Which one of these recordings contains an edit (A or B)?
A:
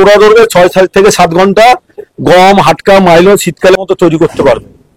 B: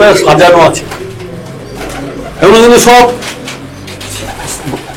A